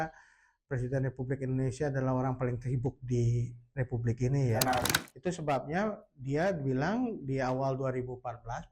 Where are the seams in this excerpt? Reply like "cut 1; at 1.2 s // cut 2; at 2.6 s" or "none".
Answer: cut 1; at 5.0 s